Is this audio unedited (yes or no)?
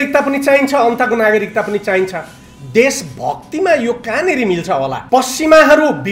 no